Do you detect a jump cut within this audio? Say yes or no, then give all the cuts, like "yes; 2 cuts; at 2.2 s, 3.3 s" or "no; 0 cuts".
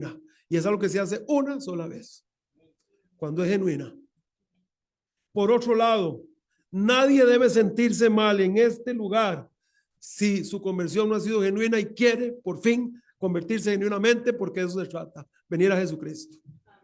no; 0 cuts